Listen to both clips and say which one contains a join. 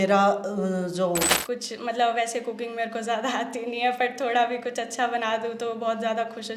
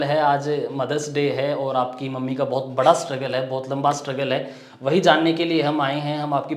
first; 1 cut; at 1.4 s

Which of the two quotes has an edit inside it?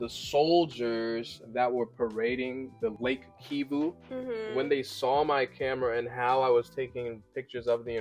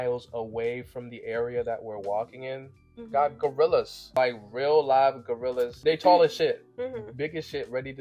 second; 2 cuts; at 4.0 s, 5.7 s

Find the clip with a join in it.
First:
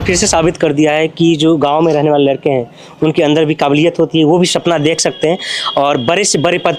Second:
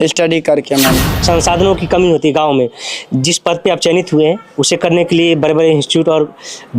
second; 1 cut; at 1.1 s

